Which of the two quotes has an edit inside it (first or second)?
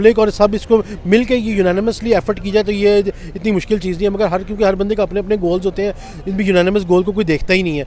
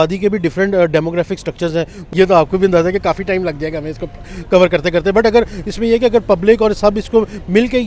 second